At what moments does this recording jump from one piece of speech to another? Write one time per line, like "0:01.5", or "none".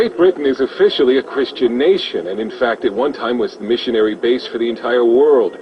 0:02.8